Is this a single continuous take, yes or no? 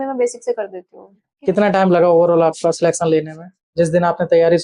no